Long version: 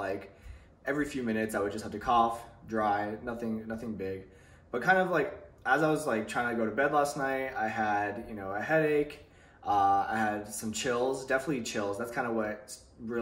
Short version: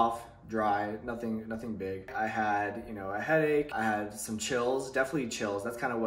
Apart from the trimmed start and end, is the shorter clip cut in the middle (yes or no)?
yes